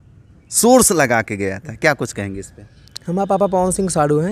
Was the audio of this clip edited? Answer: no; 0 cuts

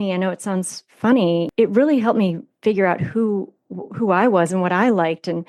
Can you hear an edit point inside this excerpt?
yes; 1 cut; at 1.5 s

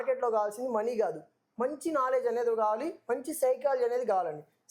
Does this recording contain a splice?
no; 0 cuts

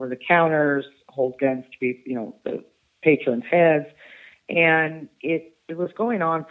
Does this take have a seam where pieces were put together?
no; 0 cuts

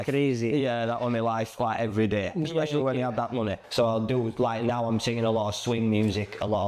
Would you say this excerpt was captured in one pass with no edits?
no; 1 cut; at 3.6 s

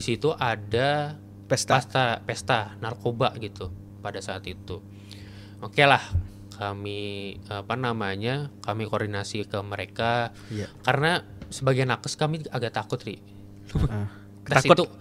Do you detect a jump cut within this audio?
no; 0 cuts

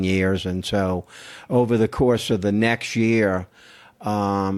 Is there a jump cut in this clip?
no; 0 cuts

